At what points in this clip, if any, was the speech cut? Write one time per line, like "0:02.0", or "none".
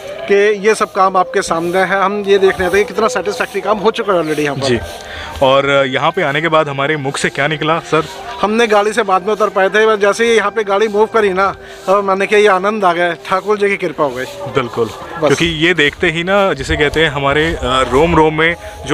none

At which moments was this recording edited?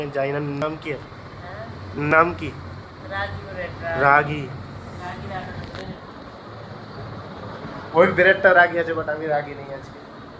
none

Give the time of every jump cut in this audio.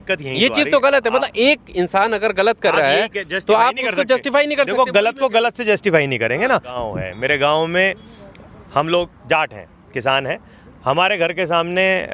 0:06.7

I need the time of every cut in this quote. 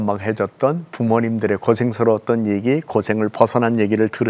none

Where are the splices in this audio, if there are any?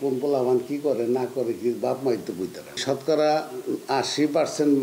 0:02.8

